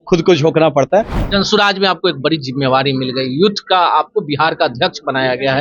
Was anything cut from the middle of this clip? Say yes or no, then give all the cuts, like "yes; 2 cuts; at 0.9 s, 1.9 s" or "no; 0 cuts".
yes; 1 cut; at 1.2 s